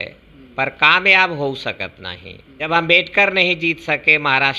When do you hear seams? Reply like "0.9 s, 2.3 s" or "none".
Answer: 2.7 s